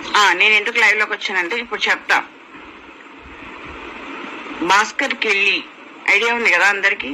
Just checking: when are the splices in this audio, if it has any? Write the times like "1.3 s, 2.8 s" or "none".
3.2 s